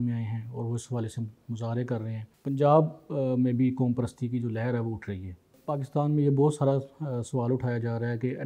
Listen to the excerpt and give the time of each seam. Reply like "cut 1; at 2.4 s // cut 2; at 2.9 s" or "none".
cut 1; at 2.2 s // cut 2; at 5.5 s